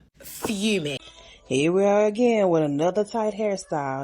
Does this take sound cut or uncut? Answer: cut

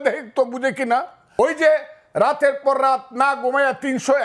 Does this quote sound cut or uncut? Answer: cut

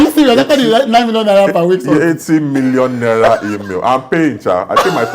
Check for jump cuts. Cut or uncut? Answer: uncut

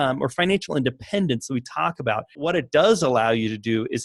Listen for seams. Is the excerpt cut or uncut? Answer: cut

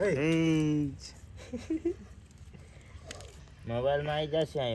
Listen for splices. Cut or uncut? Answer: uncut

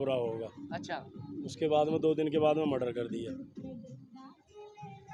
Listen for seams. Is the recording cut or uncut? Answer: uncut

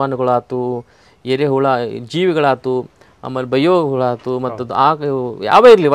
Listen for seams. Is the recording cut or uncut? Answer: uncut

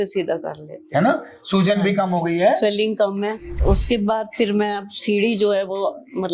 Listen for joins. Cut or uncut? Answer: cut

